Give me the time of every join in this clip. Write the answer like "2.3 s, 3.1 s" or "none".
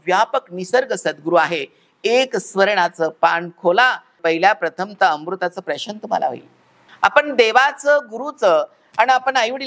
6.8 s